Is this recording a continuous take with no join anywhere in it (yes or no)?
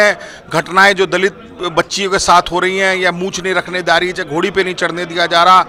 yes